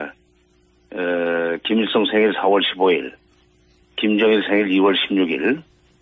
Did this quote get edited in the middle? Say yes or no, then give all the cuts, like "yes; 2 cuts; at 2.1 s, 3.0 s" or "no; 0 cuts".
no; 0 cuts